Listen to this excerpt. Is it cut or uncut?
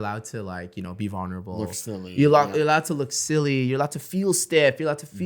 uncut